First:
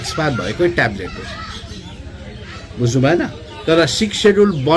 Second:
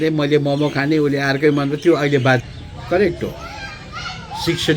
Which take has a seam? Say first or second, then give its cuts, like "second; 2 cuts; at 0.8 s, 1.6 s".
second; 1 cut; at 2.4 s